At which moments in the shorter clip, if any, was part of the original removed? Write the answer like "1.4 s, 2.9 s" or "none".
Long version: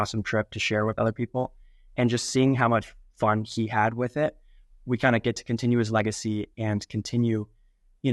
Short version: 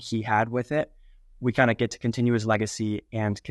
none